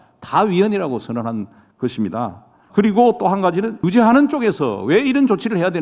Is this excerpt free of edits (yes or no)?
no